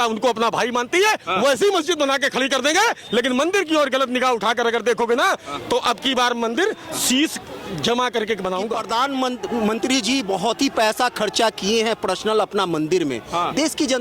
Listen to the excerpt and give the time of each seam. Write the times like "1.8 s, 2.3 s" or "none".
8.8 s

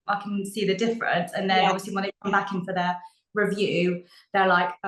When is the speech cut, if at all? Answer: none

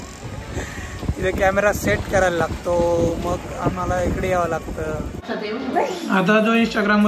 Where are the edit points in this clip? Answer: 5.2 s

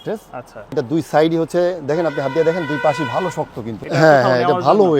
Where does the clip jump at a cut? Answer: 0.7 s, 3.7 s

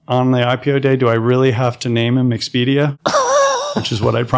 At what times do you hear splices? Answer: none

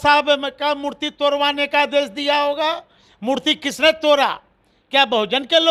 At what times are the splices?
none

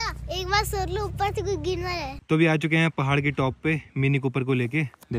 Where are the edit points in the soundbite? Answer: 2.1 s

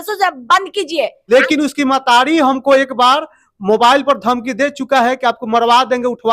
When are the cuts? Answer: 1.2 s

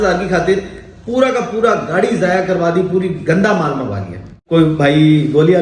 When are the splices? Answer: 4.3 s

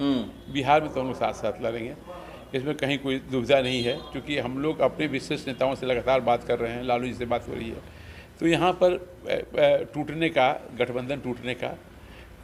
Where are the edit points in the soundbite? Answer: none

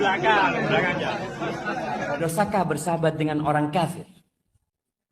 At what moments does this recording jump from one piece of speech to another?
2.2 s

